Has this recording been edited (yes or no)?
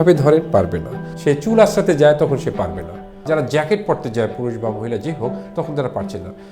yes